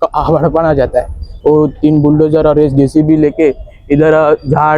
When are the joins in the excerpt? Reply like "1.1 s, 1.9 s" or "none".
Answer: 1.2 s